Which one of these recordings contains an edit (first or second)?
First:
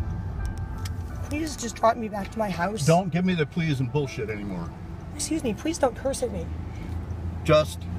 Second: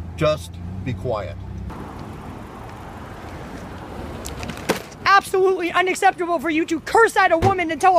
second